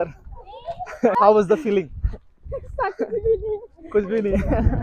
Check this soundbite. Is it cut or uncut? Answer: cut